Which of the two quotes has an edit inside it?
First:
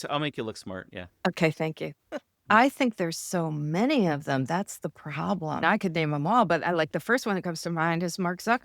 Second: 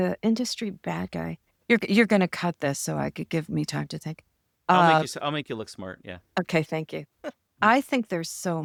first; 1 cut; at 5.6 s

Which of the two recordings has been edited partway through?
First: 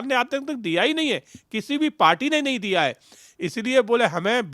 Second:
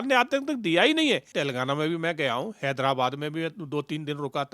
second; 1 cut; at 1.3 s

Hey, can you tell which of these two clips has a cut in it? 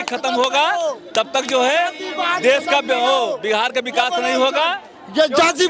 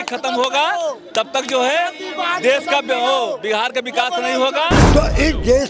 second; 1 cut; at 4.8 s

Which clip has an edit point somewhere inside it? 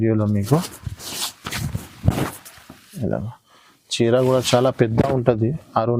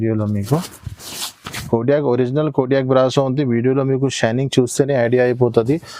second; 1 cut; at 1.6 s

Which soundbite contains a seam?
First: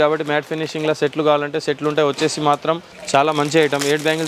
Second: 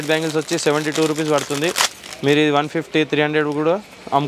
first; 1 cut; at 2.9 s

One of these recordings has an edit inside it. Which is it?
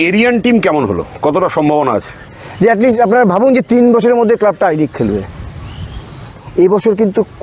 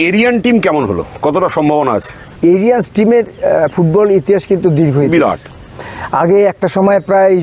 first; 2 cuts; at 2.2 s, 6.4 s

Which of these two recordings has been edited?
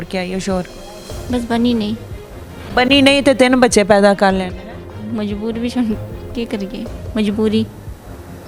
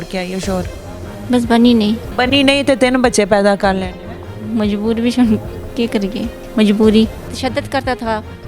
second; 2 cuts; at 2.1 s, 7.3 s

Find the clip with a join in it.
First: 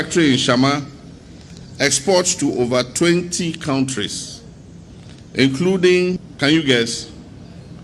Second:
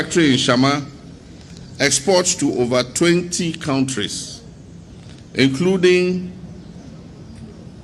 first; 1 cut; at 6.3 s

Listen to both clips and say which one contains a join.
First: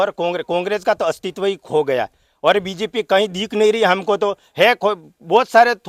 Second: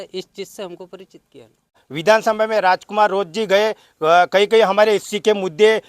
second; 1 cut; at 1.9 s

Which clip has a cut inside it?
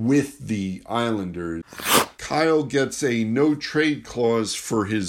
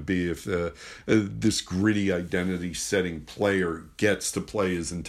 first; 1 cut; at 1.7 s

